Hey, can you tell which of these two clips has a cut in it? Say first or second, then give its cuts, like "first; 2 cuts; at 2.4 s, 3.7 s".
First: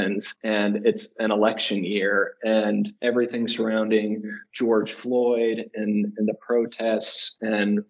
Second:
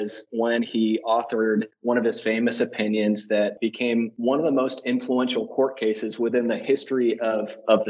second; 2 cuts; at 1.7 s, 3.6 s